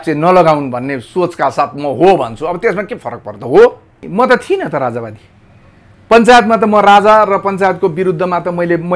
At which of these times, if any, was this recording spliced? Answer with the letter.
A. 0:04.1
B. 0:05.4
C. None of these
A